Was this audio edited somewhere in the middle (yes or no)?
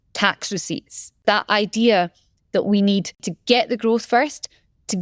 yes